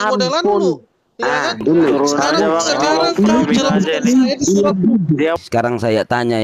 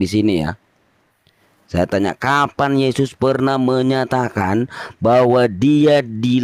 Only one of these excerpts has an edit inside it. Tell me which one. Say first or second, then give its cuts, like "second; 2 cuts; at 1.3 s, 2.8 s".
first; 1 cut; at 5.4 s